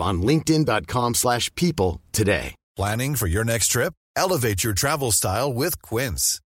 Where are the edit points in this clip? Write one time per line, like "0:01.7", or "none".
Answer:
0:02.6